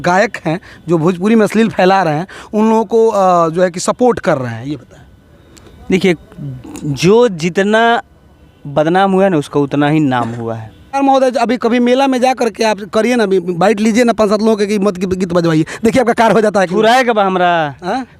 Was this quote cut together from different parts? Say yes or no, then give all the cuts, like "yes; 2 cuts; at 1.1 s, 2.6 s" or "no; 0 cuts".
yes; 1 cut; at 11.0 s